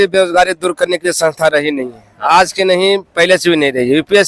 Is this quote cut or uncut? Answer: uncut